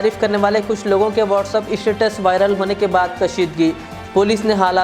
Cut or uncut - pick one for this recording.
uncut